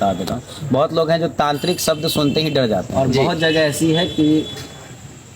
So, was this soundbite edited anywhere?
yes; 1 cut; at 2.9 s

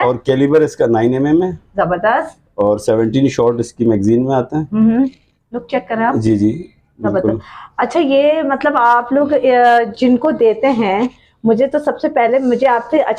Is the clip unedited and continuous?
yes; 0 cuts

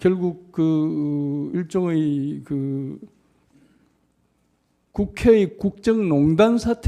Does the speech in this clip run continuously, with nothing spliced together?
no; 1 cut; at 2.8 s

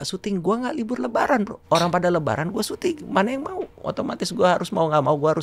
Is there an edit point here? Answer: yes; 2 cuts; at 1.6 s, 3.8 s

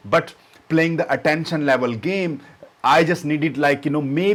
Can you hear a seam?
no; 0 cuts

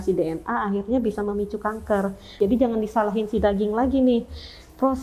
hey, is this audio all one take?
no; 1 cut; at 2.4 s

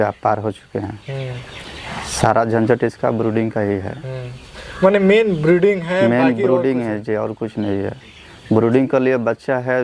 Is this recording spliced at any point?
no; 0 cuts

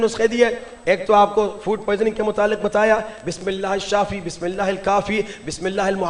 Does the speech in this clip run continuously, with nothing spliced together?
yes; 0 cuts

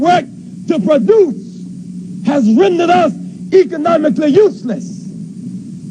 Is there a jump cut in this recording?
no; 0 cuts

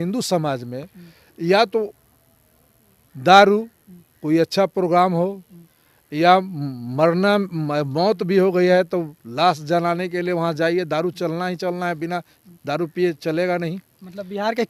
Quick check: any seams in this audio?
no; 0 cuts

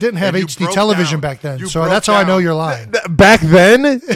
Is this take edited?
no; 0 cuts

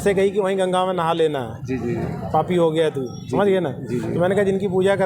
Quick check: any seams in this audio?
no; 0 cuts

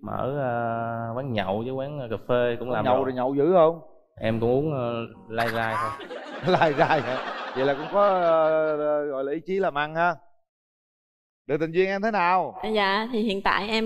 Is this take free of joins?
no; 1 cut; at 10.9 s

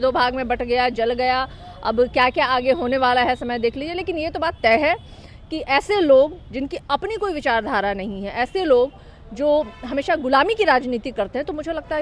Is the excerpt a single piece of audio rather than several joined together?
yes; 0 cuts

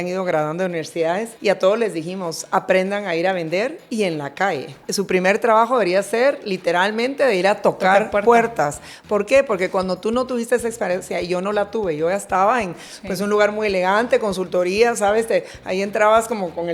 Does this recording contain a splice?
yes; 2 cuts; at 1.3 s, 4.8 s

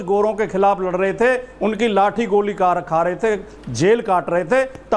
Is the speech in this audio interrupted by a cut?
no; 0 cuts

